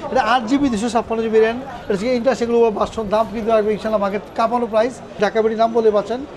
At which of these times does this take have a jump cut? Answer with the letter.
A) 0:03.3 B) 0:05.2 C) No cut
B